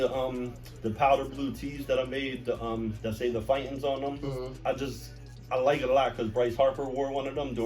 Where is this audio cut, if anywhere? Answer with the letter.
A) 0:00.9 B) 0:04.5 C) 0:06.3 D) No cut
B